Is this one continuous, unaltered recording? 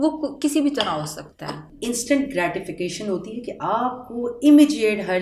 no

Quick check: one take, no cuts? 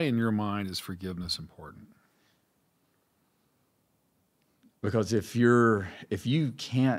yes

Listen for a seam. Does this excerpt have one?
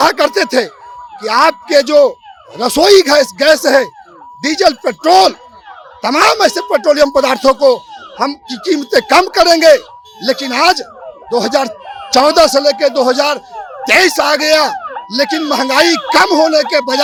no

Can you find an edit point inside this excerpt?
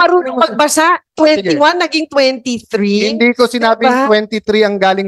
no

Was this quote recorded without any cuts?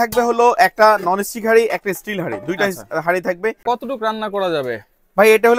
no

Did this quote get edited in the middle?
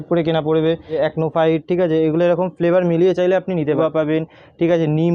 yes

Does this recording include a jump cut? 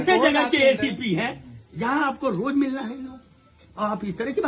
no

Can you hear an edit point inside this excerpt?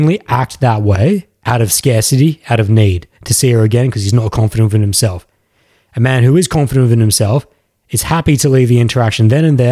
no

